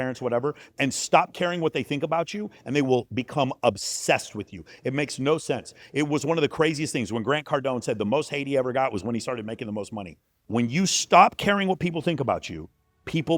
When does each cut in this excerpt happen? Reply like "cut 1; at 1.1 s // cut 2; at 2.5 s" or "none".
cut 1; at 10.4 s